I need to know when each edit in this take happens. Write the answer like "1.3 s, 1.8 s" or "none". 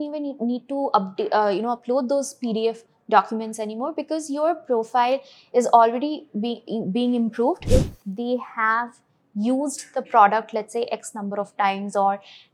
7.6 s